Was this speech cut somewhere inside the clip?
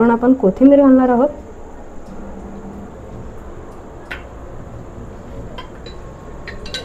no; 0 cuts

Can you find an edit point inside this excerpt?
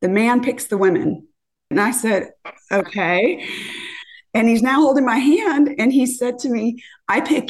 yes; 1 cut; at 1.7 s

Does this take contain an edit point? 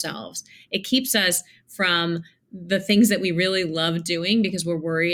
no; 0 cuts

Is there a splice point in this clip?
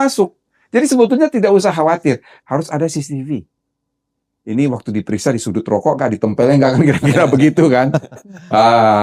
yes; 1 cut; at 2.3 s

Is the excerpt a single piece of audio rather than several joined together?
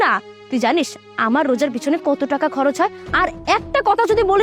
no; 1 cut; at 3.0 s

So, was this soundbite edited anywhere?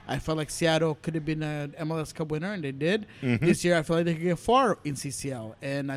no; 0 cuts

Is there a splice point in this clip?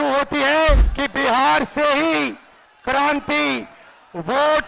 yes; 1 cut; at 0.9 s

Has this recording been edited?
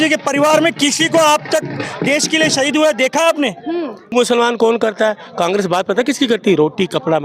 yes; 1 cut; at 4.1 s

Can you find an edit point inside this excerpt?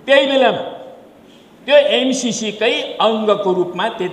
no; 0 cuts

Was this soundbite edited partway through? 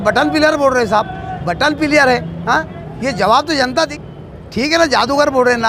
yes; 1 cut; at 3.9 s

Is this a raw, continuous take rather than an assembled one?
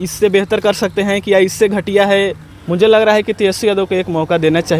yes; 0 cuts

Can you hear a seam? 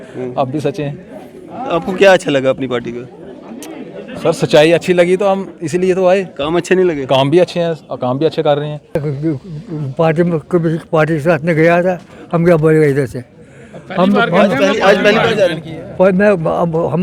yes; 1 cut; at 9.0 s

